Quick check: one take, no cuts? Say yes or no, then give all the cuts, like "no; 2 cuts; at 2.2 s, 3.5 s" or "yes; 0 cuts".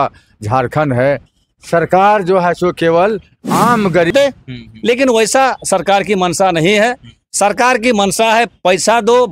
no; 1 cut; at 4.1 s